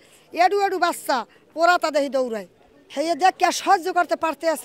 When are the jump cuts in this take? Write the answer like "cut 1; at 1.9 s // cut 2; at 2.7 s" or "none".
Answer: none

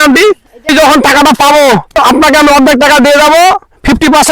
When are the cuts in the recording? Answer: cut 1; at 0.7 s // cut 2; at 1.9 s

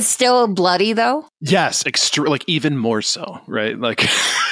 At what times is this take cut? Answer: cut 1; at 1.3 s

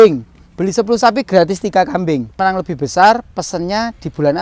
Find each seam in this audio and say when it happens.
cut 1; at 2.4 s

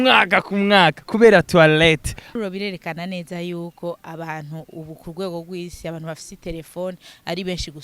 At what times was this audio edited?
cut 1; at 2.3 s

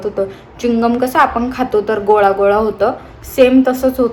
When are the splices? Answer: none

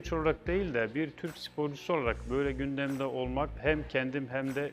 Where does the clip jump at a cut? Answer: cut 1; at 3.6 s

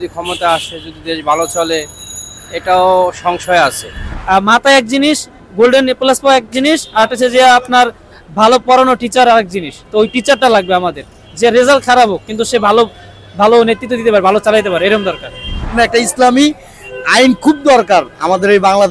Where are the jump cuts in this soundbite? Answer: cut 1; at 4.1 s // cut 2; at 15.7 s

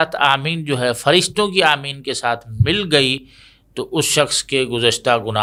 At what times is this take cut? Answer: none

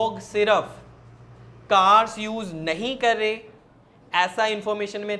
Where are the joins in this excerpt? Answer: none

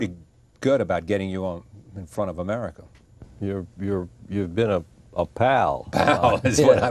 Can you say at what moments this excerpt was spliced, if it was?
cut 1; at 1.5 s

